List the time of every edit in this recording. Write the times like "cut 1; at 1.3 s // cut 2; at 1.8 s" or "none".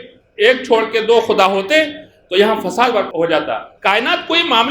cut 1; at 3.1 s